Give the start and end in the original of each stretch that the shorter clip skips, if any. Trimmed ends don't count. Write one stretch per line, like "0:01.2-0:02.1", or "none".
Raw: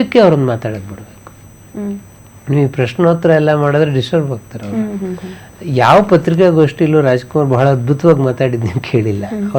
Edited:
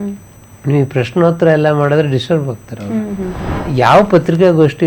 0:05.3-0:05.5